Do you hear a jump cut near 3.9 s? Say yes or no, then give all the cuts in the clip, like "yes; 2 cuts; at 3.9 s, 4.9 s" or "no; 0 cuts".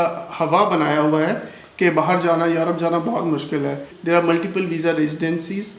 yes; 1 cut; at 3.9 s